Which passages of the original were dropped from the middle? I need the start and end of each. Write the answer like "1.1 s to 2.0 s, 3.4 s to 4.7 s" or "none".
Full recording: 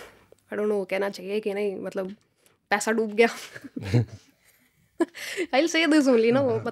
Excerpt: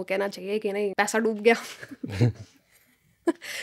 1.7 s to 2.7 s